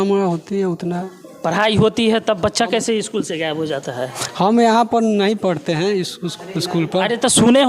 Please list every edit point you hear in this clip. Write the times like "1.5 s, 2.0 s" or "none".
none